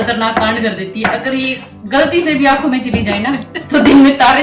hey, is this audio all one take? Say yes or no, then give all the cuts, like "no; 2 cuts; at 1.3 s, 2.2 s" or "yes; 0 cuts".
yes; 0 cuts